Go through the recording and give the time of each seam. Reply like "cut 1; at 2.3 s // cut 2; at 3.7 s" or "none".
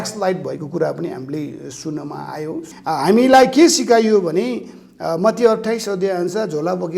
cut 1; at 2.7 s